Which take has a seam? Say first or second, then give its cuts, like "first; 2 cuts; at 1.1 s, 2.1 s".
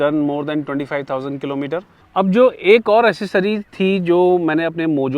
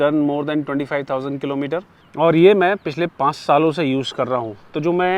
first; 1 cut; at 2.0 s